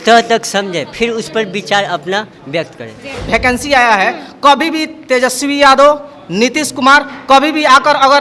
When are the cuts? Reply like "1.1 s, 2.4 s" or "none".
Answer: 3.2 s